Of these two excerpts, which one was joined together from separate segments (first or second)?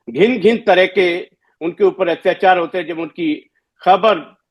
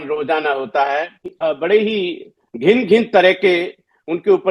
second